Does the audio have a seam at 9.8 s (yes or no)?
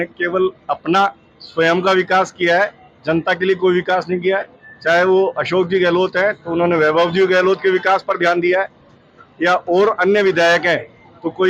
no